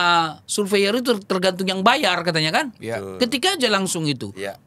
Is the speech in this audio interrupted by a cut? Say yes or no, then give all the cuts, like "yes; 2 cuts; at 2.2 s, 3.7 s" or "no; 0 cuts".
no; 0 cuts